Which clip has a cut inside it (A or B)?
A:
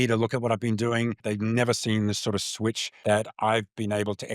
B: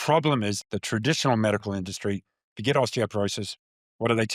A